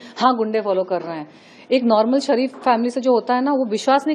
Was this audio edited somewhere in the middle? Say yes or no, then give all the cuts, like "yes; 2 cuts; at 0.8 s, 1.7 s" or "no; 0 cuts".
no; 0 cuts